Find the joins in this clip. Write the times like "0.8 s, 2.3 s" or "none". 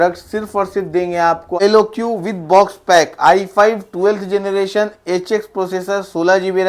1.5 s